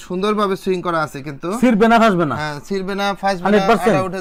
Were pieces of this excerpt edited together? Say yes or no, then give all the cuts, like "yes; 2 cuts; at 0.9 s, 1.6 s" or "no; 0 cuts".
no; 0 cuts